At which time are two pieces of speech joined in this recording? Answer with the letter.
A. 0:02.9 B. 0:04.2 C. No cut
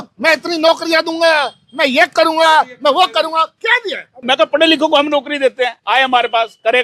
B